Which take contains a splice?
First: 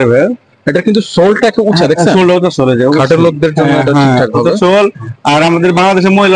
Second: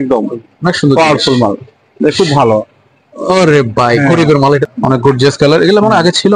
second; 1 cut; at 4.6 s

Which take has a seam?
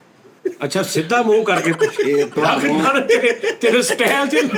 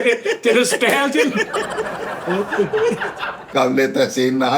second; 1 cut; at 3.5 s

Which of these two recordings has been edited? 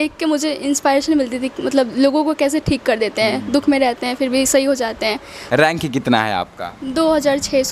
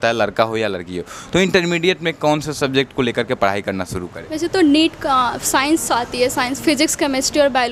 first; 1 cut; at 5.3 s

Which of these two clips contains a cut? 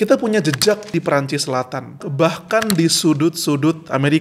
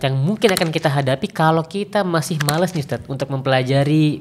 first; 2 cuts; at 0.9 s, 2.0 s

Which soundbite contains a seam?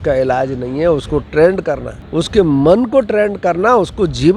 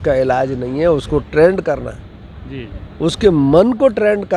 first; 1 cut; at 1.9 s

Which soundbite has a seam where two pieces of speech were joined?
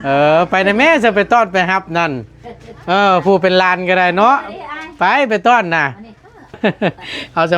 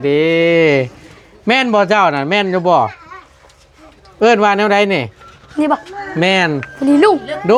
first; 1 cut; at 6.6 s

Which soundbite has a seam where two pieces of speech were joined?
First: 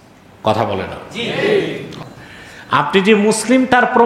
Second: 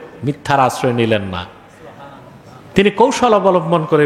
first; 1 cut; at 1.9 s

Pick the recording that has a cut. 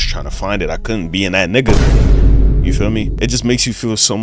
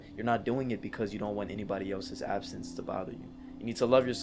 first; 1 cut; at 3.1 s

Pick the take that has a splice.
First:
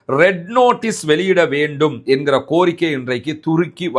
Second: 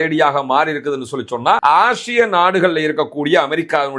second; 1 cut; at 1.6 s

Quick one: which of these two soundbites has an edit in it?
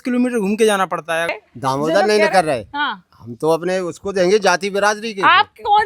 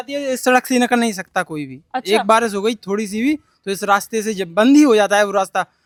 first; 1 cut; at 1.4 s

